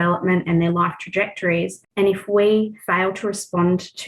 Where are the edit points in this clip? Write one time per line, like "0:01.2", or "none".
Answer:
0:01.8
0:02.8